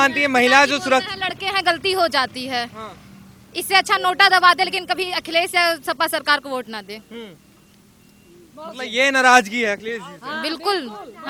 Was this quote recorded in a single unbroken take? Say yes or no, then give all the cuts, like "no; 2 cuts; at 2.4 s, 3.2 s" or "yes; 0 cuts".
yes; 0 cuts